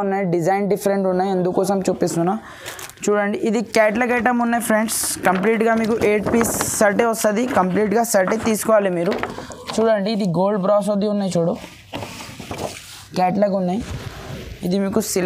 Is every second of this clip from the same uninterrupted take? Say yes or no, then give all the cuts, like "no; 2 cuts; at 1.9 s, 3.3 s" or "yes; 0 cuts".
yes; 0 cuts